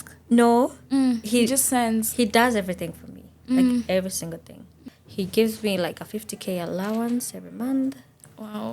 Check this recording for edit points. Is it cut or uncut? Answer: cut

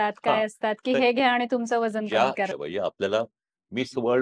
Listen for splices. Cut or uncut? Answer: cut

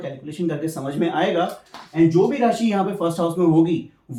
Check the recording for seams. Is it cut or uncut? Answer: uncut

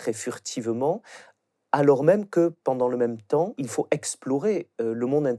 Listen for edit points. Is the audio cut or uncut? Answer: cut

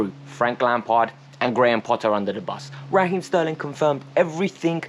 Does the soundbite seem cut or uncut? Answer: uncut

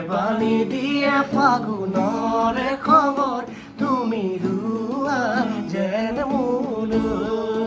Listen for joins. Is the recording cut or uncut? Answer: uncut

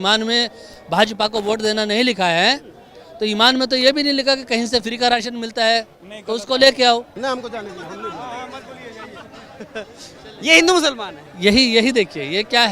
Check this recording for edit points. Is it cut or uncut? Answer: cut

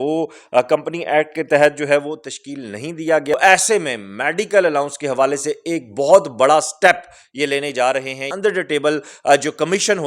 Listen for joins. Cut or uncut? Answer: cut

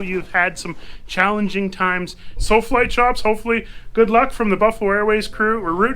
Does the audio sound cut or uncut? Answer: cut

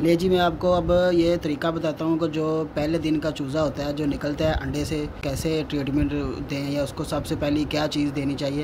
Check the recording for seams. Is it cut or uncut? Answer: cut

